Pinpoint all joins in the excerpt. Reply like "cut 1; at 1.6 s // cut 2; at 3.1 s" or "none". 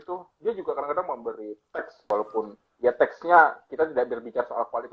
cut 1; at 2.1 s